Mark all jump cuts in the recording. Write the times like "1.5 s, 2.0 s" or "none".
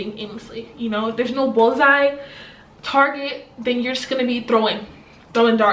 none